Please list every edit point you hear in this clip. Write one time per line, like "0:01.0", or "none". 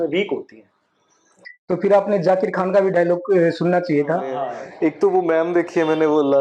0:04.4